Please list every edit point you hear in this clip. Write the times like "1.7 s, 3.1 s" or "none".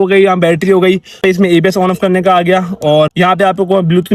1.2 s, 3.1 s